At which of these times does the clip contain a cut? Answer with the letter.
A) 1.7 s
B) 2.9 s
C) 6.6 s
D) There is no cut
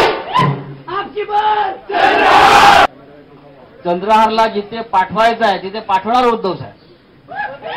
B